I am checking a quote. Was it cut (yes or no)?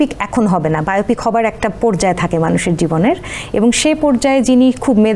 no